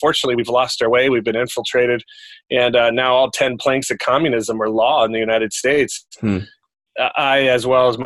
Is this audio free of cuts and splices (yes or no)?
yes